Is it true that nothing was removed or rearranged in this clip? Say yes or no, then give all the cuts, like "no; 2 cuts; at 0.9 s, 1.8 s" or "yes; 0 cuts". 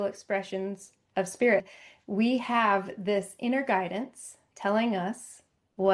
no; 1 cut; at 1.8 s